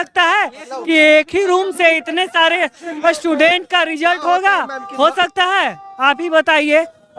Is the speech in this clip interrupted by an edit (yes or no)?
no